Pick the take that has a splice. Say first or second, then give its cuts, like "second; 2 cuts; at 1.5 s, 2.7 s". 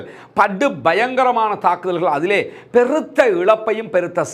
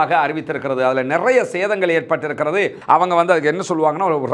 second; 1 cut; at 2.8 s